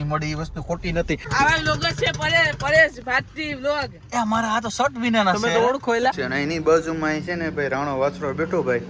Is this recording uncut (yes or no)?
no